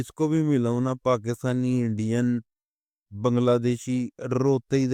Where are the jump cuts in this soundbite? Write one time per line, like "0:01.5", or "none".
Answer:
none